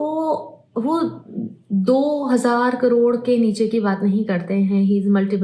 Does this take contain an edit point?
no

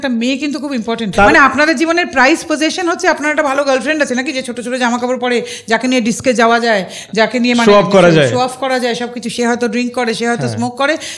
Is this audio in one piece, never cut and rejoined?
no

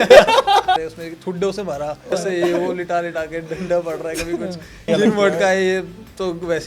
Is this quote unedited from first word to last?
no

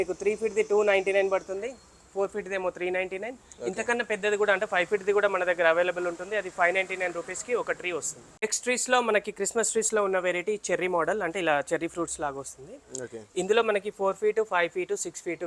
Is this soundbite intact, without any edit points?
yes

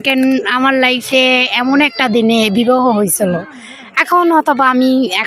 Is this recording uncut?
yes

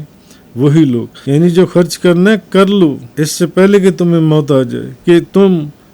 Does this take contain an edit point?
yes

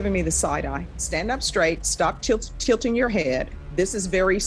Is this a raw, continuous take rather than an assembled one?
no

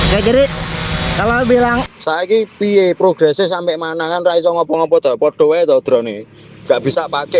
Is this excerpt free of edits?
no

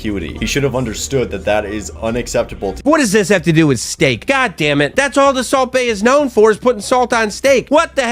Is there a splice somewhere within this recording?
yes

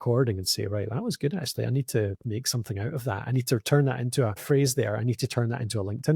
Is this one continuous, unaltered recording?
no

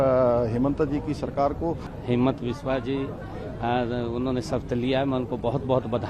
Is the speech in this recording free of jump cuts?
no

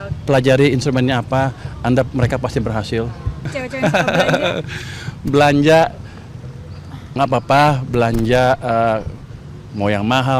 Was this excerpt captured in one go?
no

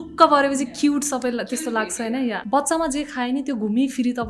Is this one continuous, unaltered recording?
no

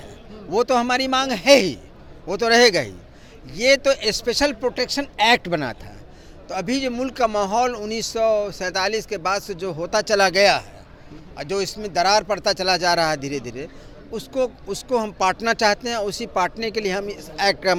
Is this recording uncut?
yes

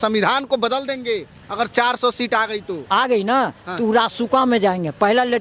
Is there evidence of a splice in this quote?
no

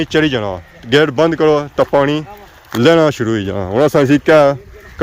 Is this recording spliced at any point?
no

